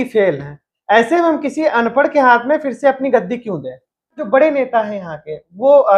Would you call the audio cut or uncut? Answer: cut